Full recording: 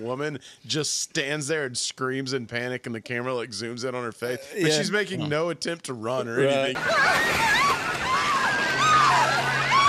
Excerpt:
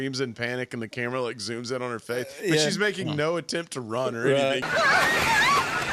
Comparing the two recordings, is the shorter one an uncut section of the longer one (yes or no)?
yes